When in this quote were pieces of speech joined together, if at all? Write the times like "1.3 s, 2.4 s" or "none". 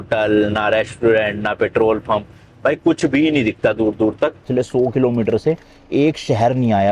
4.4 s